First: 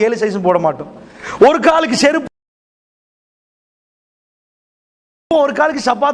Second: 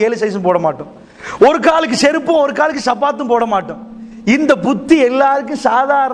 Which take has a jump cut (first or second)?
second